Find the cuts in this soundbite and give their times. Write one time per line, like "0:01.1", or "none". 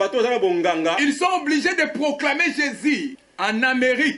0:03.2